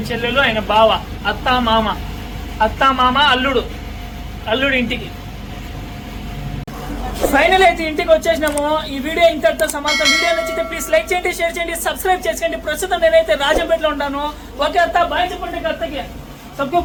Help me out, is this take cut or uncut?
uncut